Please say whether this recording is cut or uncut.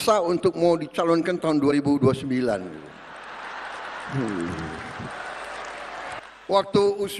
cut